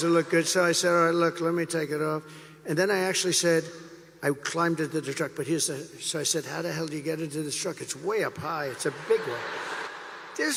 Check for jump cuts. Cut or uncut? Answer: uncut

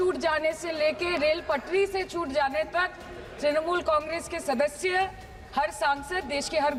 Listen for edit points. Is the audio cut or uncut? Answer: uncut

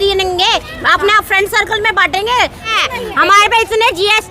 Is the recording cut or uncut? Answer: cut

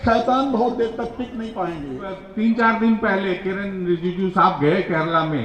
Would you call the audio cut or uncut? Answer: cut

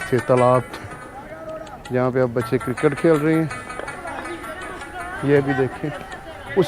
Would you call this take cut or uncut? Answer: cut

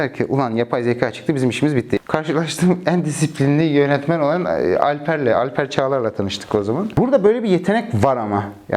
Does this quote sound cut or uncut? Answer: cut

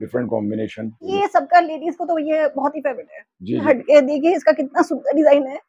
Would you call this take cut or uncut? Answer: cut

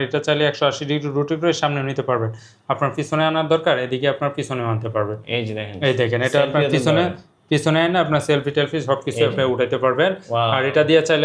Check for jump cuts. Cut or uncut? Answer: uncut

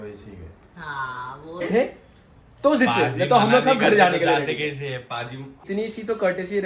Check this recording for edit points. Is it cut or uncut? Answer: cut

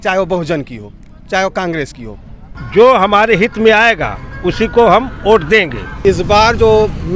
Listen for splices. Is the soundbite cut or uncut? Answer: cut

